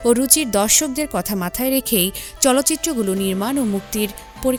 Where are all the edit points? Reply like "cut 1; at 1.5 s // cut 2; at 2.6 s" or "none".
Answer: none